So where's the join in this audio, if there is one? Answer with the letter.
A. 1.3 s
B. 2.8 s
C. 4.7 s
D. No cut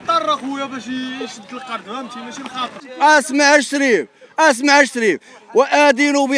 B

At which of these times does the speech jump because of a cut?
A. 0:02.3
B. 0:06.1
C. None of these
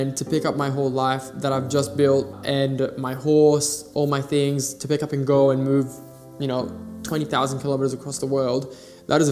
A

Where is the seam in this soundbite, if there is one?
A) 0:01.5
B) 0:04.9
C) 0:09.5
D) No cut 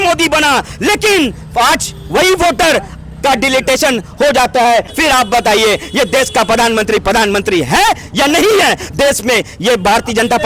B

